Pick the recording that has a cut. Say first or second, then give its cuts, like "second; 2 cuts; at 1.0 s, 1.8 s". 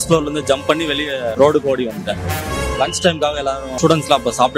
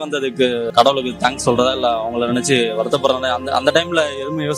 first; 3 cuts; at 1.3 s, 2.4 s, 3.7 s